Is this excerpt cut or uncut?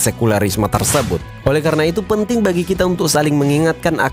cut